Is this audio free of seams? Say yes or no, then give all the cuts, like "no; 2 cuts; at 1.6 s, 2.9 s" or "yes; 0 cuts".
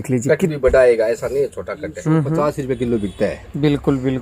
no; 1 cut; at 2.3 s